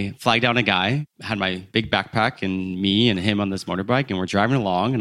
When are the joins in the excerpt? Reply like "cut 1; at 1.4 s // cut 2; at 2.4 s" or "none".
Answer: cut 1; at 1.5 s